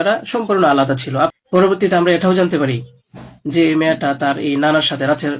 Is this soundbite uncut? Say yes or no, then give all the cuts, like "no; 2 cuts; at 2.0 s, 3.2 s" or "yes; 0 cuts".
no; 1 cut; at 1.3 s